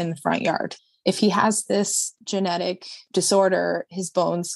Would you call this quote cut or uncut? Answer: cut